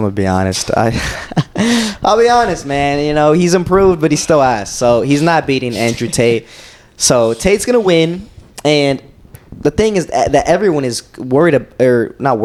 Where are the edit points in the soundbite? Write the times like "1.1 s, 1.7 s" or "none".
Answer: none